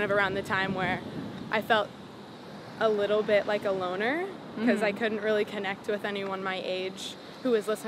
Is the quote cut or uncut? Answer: uncut